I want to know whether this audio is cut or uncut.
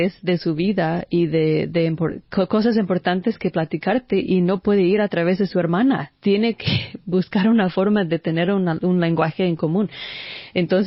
uncut